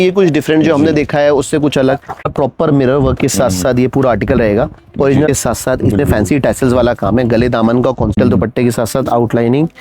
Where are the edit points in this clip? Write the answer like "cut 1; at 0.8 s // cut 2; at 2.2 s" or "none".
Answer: cut 1; at 2.3 s // cut 2; at 5.3 s // cut 3; at 8.2 s